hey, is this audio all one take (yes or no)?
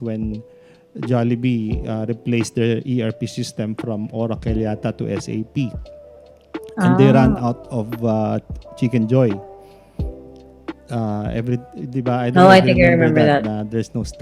yes